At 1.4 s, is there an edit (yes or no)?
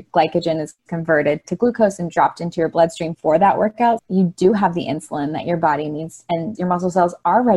no